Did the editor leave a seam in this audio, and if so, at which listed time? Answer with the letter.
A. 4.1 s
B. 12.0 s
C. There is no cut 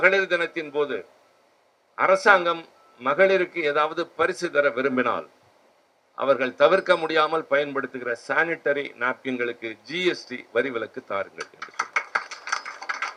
C